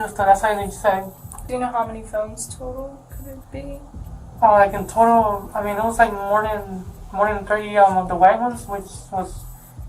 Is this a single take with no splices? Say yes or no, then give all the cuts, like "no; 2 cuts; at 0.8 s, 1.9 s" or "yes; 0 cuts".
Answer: no; 1 cut; at 1.4 s